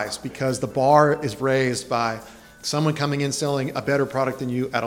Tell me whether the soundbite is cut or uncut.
uncut